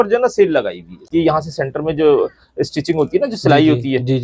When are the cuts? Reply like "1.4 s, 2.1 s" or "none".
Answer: 1.1 s